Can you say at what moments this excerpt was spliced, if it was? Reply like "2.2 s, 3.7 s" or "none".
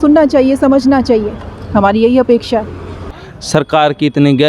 3.1 s